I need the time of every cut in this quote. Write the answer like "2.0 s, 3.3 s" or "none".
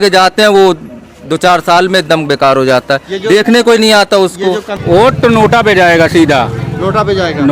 4.7 s